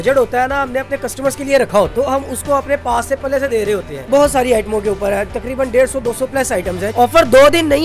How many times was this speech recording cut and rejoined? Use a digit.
3